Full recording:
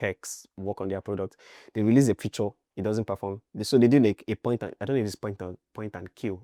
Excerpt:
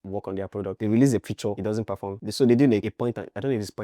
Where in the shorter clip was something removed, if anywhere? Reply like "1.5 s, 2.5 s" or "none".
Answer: 0.8 s, 1.8 s, 2.8 s